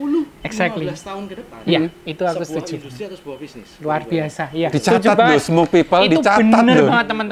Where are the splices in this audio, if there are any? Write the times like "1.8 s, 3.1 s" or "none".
none